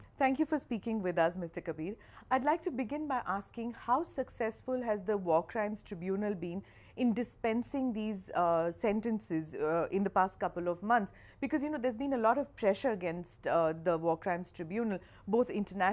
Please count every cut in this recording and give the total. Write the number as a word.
one